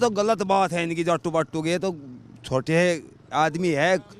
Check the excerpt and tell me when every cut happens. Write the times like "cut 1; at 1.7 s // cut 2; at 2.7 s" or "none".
none

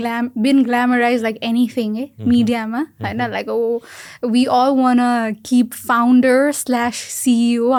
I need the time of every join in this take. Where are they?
none

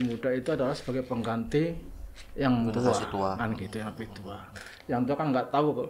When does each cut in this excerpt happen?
none

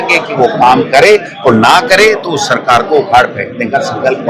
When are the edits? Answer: none

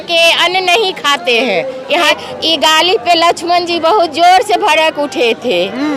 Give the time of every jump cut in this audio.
cut 1; at 2.1 s

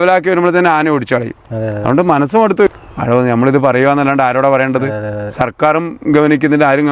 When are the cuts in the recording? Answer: cut 1; at 2.7 s

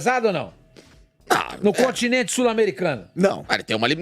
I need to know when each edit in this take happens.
none

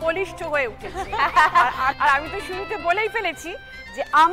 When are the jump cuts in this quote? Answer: cut 1; at 2.0 s

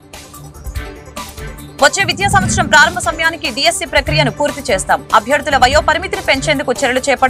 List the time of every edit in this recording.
cut 1; at 1.6 s

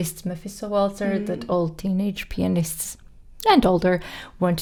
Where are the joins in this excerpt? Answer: none

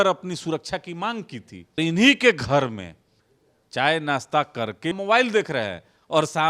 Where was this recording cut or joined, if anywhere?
cut 1; at 1.8 s // cut 2; at 5.0 s

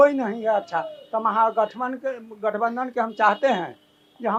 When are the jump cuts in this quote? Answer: none

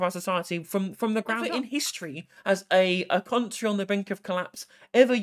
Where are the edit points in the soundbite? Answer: cut 1; at 1.4 s

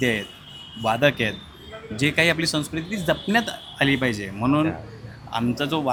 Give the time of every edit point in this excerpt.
none

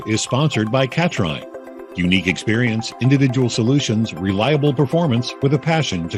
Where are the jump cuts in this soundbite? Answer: none

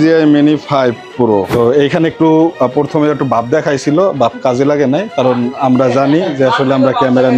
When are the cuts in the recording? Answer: cut 1; at 1.5 s

